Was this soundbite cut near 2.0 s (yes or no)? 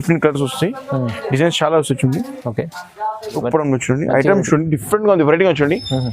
no